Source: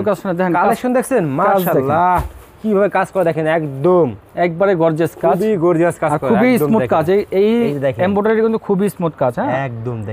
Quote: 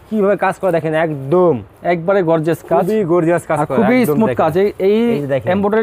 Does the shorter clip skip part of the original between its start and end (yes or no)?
no